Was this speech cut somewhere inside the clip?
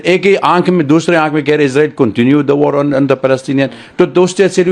no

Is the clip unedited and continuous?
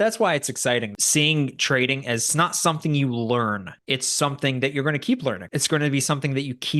no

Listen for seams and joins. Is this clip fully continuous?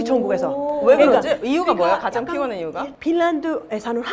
no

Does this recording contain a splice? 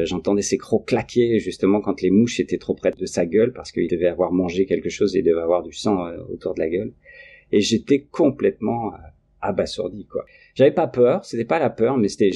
yes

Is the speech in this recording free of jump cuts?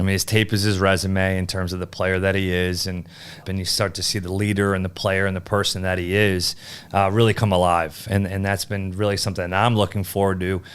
no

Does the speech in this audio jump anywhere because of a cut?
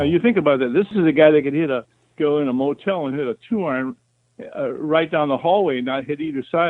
yes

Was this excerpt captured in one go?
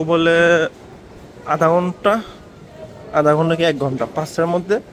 yes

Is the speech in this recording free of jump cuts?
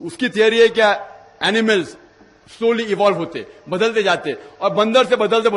yes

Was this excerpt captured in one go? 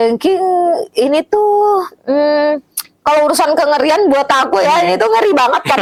yes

